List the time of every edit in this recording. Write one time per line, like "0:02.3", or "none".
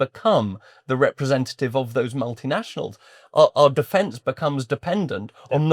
none